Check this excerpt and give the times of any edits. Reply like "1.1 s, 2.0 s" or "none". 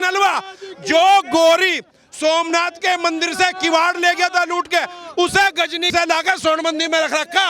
5.9 s